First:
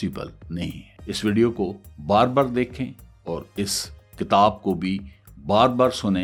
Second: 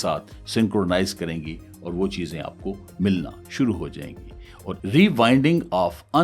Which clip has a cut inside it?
second; 1 cut; at 4.7 s

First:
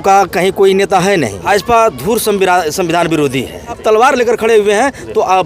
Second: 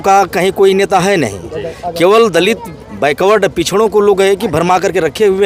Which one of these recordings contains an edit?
first; 2 cuts; at 1.4 s, 3.8 s

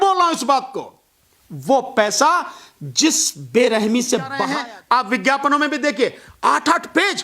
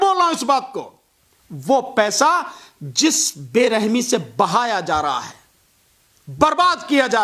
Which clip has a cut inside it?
first; 1 cut; at 4.4 s

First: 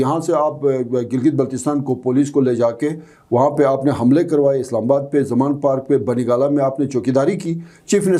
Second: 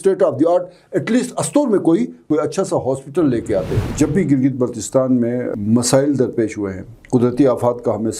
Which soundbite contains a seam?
second; 2 cuts; at 2.3 s, 3.9 s

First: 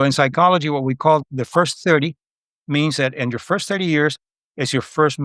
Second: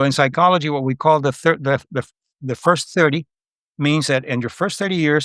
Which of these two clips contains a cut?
first; 1 cut; at 1.2 s

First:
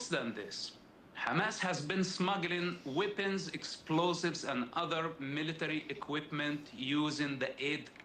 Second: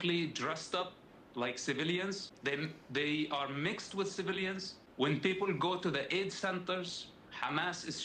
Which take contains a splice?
second; 2 cuts; at 2.3 s, 4.8 s

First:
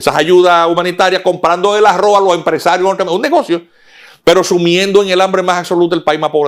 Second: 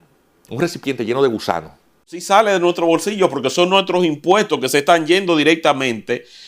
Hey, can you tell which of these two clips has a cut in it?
second; 1 cut; at 2.2 s

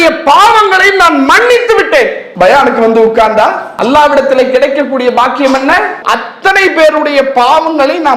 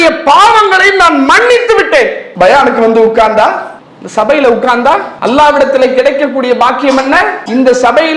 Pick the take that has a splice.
first; 2 cuts; at 3.7 s, 6.0 s

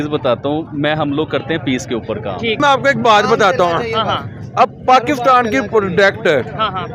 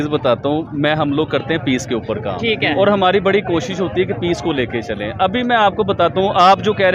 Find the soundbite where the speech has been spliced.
first; 1 cut; at 2.6 s

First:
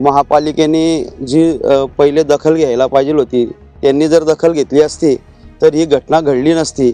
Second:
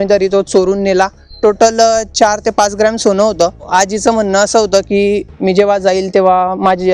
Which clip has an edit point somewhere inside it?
second; 2 cuts; at 1.2 s, 3.6 s

